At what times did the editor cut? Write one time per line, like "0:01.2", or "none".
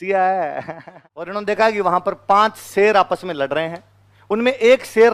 0:01.3